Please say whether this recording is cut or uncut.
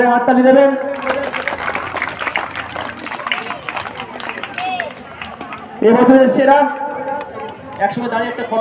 uncut